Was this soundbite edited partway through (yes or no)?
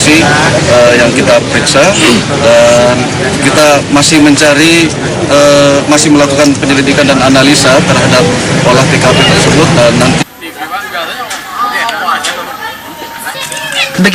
no